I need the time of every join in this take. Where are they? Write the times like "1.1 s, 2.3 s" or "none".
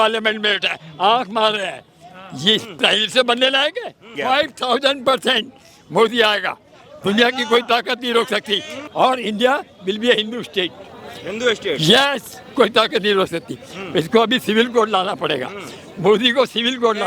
4.1 s, 8.9 s